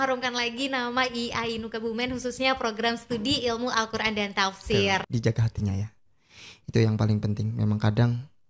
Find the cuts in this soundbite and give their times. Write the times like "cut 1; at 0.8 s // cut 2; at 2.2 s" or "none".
cut 1; at 5.1 s